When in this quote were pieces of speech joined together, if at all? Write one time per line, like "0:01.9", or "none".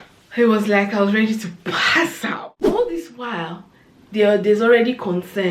0:02.3